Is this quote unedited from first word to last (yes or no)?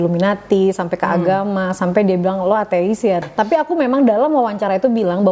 no